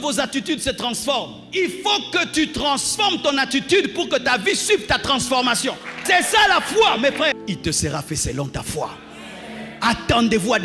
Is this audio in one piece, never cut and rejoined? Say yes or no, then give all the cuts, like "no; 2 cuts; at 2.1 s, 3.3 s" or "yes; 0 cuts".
no; 4 cuts; at 1.4 s, 5.9 s, 7.4 s, 9.7 s